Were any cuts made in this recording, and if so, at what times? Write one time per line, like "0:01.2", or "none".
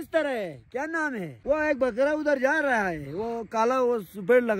0:01.3